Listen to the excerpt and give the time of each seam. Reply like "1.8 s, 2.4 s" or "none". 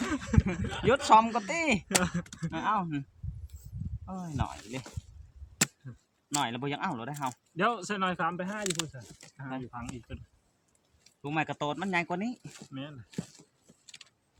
none